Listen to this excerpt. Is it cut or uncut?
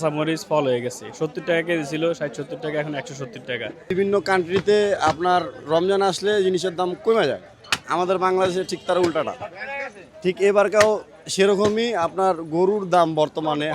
cut